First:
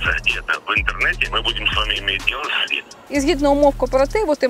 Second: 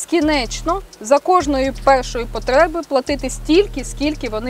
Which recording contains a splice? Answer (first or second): first